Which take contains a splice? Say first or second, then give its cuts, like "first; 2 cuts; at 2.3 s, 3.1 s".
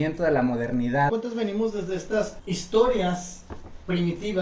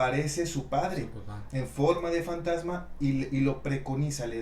first; 2 cuts; at 1.1 s, 2.4 s